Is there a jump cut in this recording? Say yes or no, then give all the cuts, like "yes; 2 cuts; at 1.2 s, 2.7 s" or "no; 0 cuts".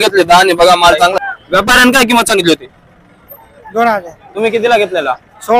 yes; 1 cut; at 1.1 s